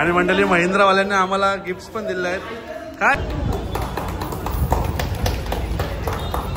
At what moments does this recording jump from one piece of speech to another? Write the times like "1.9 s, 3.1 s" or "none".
3.1 s